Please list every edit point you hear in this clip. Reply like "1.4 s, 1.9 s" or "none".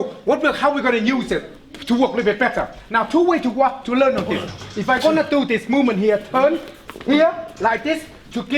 none